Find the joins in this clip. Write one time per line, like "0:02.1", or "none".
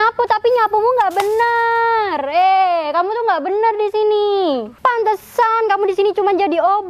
0:04.7